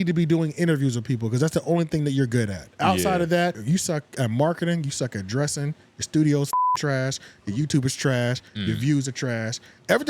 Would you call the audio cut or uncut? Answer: cut